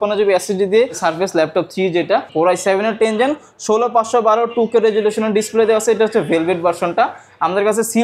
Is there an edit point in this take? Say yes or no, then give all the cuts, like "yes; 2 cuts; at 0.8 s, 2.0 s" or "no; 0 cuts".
yes; 2 cuts; at 1.0 s, 2.3 s